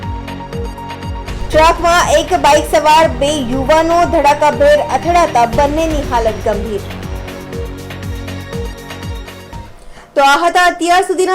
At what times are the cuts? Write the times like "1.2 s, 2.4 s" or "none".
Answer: none